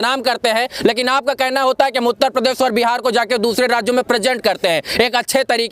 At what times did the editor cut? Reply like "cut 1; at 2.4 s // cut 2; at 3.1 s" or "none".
none